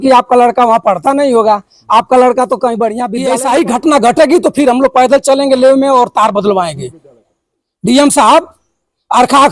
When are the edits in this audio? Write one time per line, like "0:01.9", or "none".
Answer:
0:03.1